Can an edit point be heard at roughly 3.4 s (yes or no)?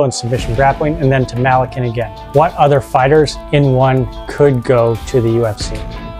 no